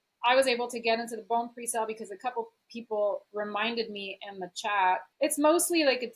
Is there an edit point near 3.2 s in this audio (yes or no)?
no